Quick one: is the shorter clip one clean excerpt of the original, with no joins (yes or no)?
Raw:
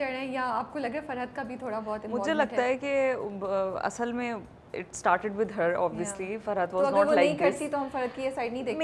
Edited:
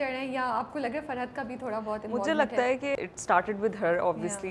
no